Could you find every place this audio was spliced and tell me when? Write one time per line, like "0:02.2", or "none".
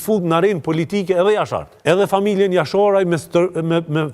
0:01.7